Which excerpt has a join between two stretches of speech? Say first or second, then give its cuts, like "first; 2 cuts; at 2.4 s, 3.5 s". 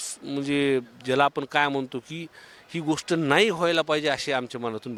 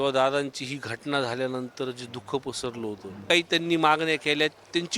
second; 1 cut; at 3.2 s